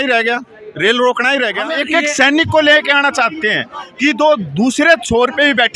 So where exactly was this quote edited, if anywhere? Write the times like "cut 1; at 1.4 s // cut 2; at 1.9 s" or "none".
cut 1; at 1.7 s